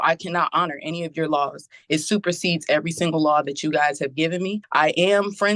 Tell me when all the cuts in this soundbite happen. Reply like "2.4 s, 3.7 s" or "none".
4.6 s